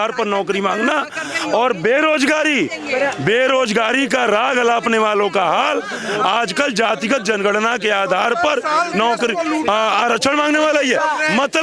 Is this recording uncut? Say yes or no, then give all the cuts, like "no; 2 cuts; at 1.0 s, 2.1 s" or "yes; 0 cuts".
yes; 0 cuts